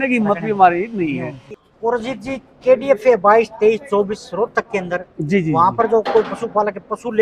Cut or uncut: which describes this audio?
cut